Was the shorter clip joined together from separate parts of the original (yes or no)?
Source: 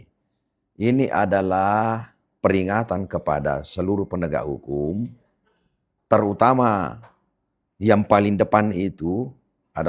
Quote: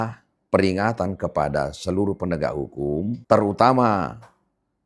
yes